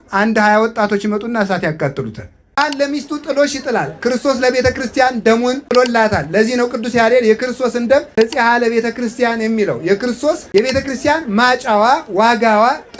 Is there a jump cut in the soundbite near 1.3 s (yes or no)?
no